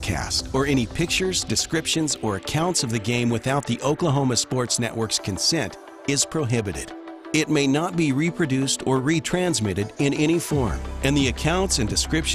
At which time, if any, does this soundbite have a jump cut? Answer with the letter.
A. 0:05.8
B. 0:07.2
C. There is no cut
C